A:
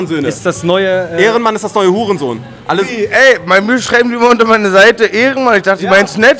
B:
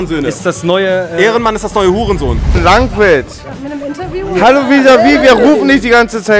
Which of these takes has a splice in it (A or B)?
B